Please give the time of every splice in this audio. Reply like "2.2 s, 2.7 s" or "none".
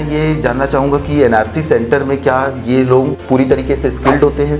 none